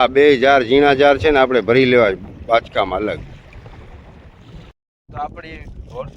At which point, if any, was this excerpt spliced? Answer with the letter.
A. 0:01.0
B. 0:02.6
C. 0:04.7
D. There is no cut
C